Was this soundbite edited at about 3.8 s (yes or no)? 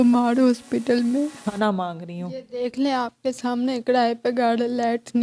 no